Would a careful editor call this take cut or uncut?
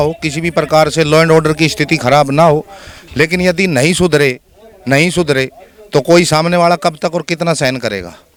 uncut